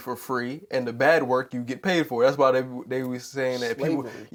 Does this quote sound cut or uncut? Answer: uncut